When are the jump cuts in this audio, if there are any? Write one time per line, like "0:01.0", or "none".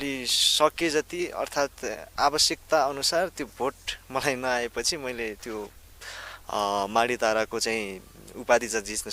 none